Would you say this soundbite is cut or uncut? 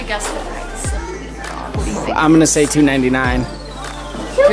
uncut